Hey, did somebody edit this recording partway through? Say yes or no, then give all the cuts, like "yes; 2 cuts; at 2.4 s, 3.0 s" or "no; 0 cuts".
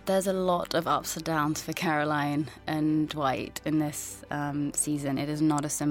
no; 0 cuts